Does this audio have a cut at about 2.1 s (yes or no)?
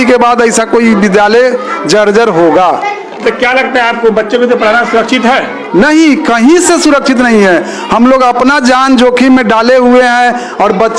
no